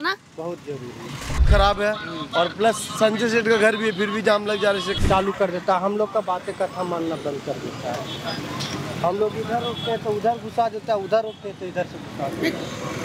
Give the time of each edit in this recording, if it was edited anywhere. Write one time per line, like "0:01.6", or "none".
0:01.4
0:04.9